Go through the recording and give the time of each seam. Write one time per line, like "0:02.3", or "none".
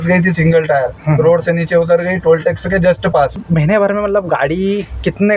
0:03.4